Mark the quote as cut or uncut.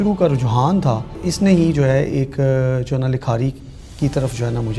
cut